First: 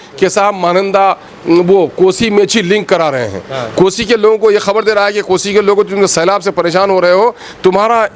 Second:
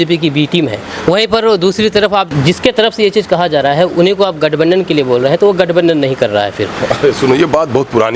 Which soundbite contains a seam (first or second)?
second